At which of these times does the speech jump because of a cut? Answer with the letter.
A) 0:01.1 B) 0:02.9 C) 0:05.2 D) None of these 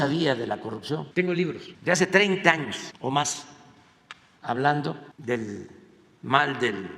A